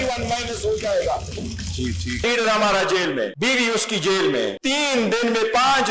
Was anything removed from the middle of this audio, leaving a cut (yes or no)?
yes